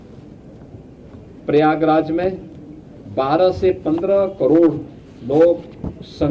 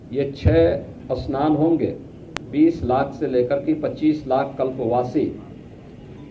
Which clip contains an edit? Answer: second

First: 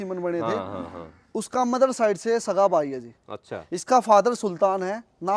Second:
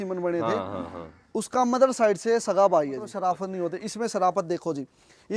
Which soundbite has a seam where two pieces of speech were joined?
second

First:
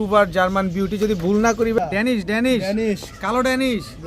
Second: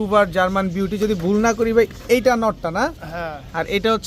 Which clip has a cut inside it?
first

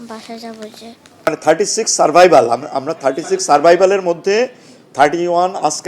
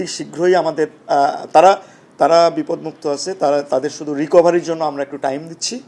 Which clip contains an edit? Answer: first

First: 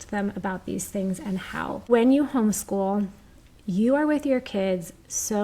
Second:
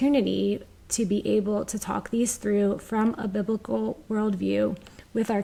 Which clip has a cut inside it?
first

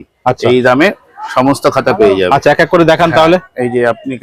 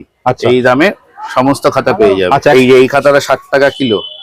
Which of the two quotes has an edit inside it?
second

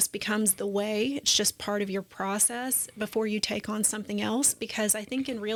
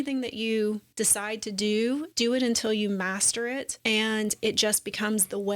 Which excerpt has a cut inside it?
second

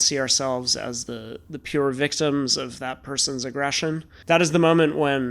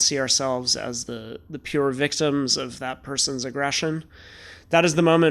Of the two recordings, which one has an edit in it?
first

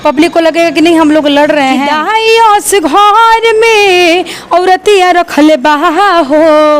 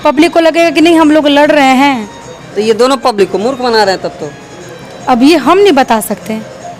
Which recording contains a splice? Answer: first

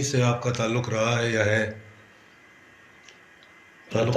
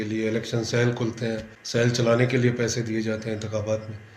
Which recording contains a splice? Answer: second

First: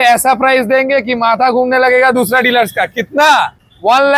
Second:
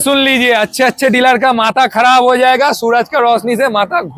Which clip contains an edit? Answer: first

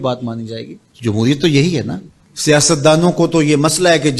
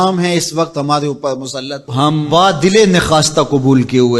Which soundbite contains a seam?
first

